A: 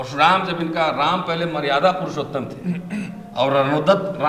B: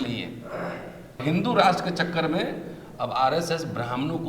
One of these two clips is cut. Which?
B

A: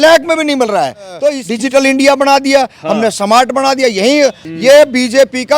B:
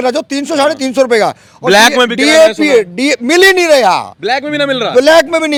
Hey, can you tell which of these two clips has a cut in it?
A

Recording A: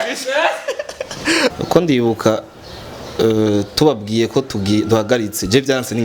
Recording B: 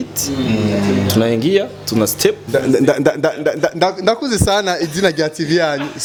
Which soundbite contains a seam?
A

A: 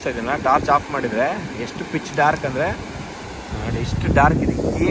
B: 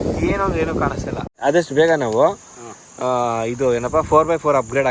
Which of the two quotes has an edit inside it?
B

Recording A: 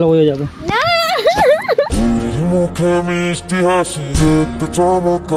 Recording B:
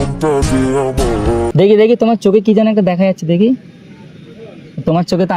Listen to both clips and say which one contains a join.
B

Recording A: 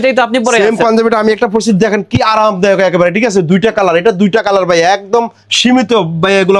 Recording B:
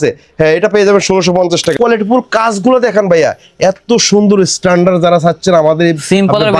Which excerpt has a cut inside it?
B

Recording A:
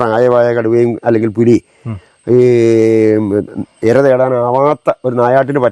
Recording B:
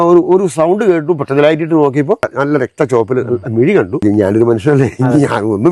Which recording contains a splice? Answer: B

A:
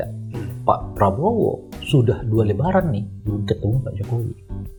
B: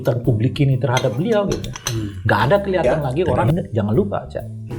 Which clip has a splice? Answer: B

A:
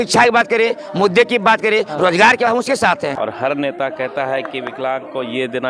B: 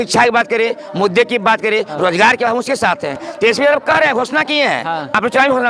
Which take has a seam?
A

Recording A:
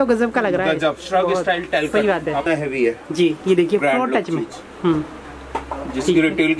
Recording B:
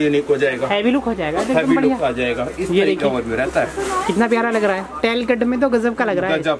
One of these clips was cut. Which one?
A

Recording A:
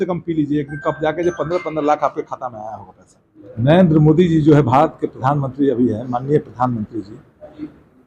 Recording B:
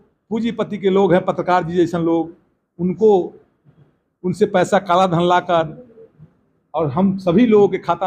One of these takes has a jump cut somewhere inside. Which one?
A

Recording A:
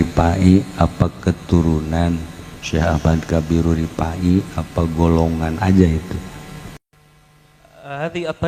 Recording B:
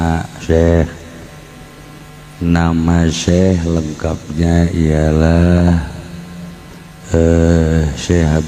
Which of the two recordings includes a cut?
A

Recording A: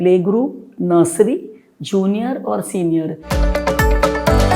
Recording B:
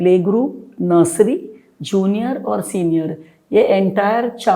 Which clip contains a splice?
A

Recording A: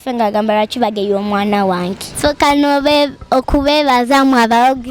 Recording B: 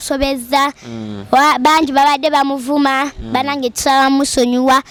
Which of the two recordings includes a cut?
A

